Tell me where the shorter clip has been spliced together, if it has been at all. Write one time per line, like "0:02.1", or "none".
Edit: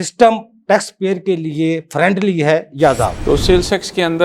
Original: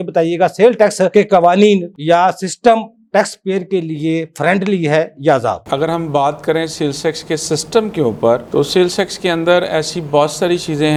0:03.2

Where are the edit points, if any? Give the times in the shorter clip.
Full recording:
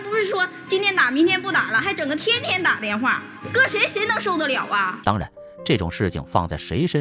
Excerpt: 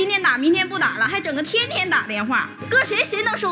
0:02.5

